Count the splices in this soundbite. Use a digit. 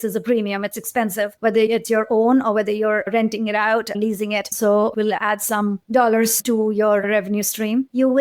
1